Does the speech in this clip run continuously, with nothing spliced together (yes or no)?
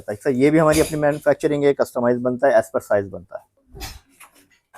no